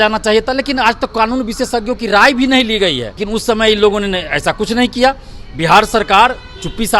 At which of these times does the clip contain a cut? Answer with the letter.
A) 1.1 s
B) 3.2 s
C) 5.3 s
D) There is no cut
B